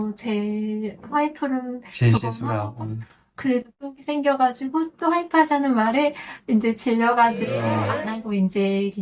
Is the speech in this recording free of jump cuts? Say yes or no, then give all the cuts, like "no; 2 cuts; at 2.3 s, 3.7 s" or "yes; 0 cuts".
yes; 0 cuts